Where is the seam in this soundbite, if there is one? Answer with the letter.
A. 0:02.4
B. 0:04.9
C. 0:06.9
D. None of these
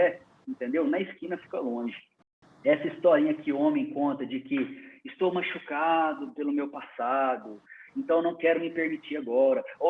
A